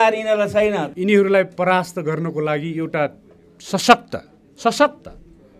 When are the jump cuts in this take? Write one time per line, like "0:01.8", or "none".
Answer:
0:00.9